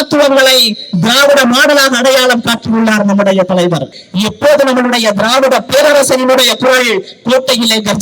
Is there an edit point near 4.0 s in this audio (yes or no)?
yes